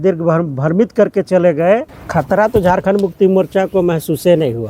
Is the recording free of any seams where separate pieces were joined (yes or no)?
no